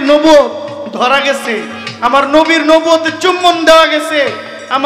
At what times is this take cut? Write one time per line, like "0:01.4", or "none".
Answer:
none